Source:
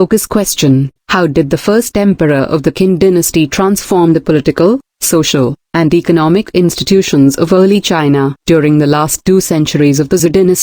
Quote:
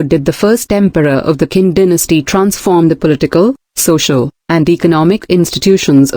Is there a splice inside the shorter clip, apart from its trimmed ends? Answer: no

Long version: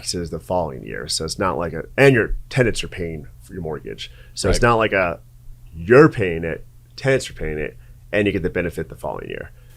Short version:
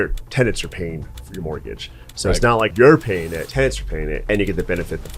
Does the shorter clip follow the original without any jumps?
no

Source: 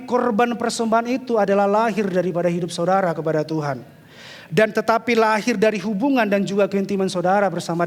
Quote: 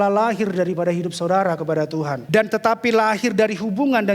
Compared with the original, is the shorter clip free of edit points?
no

